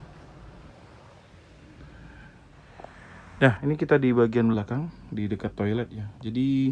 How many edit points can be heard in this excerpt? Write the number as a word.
one